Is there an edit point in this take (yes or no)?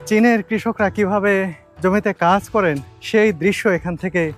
yes